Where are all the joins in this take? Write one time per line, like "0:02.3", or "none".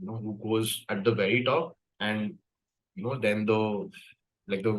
0:01.8